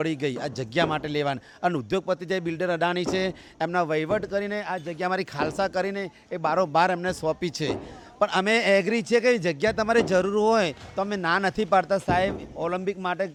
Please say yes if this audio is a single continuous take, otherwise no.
yes